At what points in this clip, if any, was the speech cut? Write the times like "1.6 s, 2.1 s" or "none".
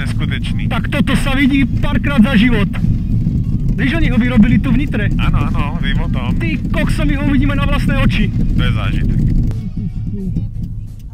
none